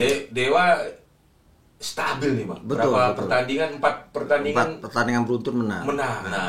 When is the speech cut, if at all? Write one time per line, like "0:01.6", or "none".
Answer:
none